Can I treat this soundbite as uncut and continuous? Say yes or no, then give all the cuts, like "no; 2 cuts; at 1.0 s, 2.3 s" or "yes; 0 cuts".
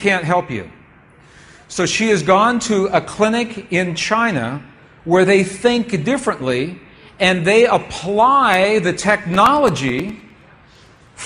no; 1 cut; at 6.3 s